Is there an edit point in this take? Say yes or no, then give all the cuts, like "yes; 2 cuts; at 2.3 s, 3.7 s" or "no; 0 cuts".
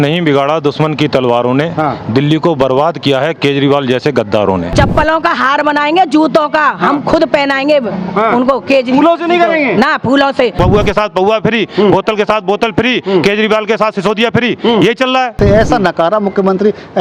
yes; 3 cuts; at 4.7 s, 10.5 s, 15.3 s